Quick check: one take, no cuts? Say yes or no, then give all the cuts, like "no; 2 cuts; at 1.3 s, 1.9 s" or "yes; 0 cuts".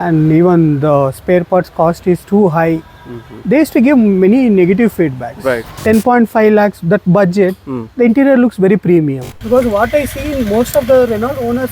no; 2 cuts; at 5.7 s, 9.3 s